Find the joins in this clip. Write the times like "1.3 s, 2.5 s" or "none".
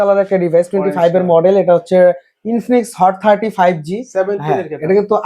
none